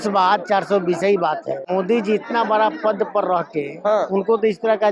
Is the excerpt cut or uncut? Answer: cut